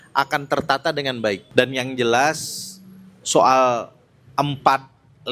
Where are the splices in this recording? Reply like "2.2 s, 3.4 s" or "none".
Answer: 1.4 s